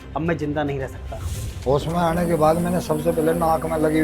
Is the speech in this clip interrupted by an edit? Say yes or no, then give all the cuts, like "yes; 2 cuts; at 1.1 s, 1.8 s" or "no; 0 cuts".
yes; 1 cut; at 1.3 s